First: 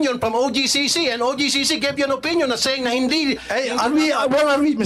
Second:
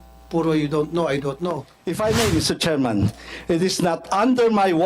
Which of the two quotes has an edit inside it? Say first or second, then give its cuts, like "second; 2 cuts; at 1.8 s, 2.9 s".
second; 1 cut; at 1.7 s